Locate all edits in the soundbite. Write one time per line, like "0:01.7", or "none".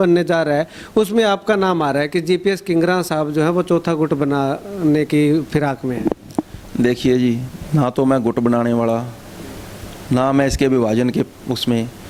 none